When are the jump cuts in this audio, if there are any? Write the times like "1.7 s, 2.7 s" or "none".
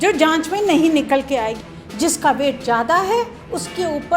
1.6 s

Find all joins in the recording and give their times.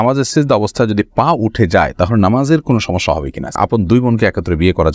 3.5 s

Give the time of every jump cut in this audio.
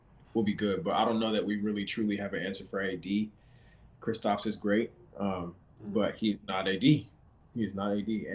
none

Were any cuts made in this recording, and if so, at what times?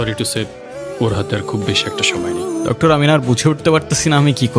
2.6 s

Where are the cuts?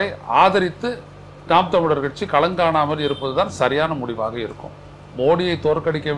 none

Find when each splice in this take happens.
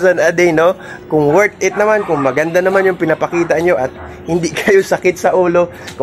none

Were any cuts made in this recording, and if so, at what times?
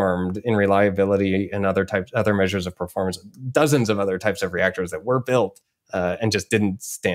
none

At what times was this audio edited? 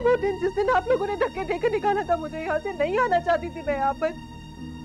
none

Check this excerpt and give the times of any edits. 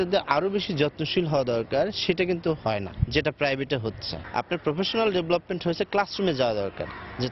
none

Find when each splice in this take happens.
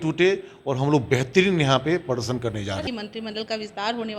2.8 s

